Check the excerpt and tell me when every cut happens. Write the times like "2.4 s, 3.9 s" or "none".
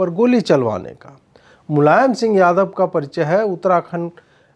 none

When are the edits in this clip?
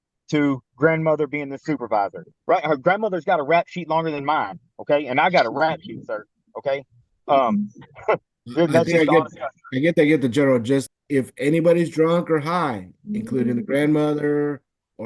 2.3 s, 10.9 s

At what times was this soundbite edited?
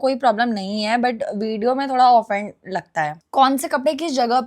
3.2 s

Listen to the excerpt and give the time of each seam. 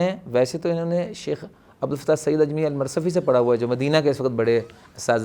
none

